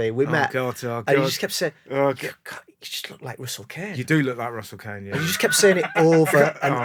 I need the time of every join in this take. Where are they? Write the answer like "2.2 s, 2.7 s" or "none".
none